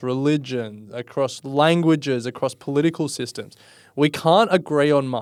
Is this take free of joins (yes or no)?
yes